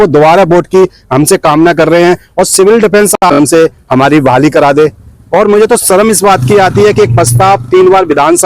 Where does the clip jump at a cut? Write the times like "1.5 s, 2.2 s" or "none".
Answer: 3.2 s